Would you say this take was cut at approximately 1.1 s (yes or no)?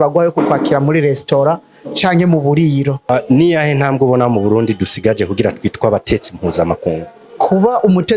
no